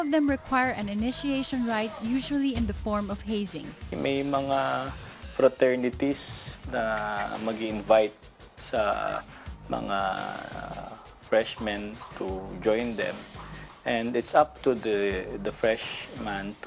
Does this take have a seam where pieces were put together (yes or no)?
yes